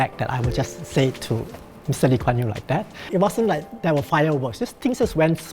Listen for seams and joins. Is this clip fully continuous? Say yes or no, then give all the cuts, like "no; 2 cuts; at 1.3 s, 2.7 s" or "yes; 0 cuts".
no; 1 cut; at 3.0 s